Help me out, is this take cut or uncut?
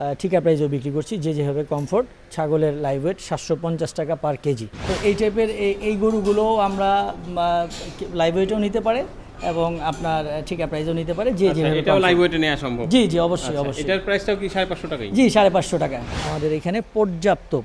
cut